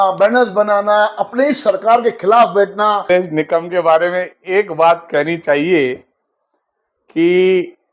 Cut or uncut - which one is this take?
cut